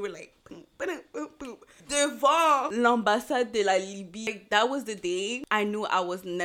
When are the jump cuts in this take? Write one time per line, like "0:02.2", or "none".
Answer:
0:01.8
0:04.3